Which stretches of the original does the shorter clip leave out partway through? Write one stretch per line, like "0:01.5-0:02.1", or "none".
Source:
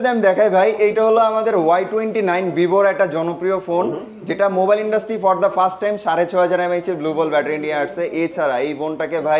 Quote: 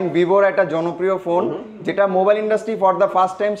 none